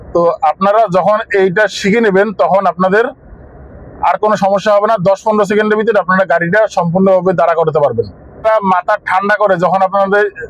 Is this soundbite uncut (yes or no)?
no